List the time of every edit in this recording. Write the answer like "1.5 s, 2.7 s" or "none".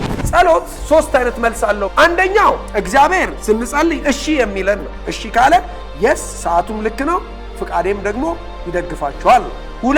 2.7 s, 4.9 s